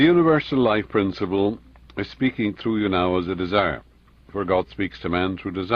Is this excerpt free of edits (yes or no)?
yes